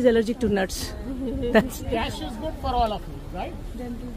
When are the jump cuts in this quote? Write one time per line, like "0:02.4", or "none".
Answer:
none